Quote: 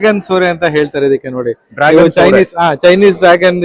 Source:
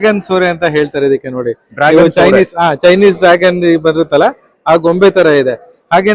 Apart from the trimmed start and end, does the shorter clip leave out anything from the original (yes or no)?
no